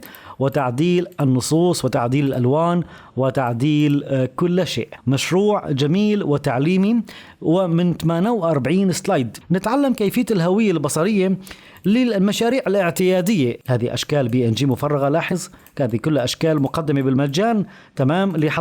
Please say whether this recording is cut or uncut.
cut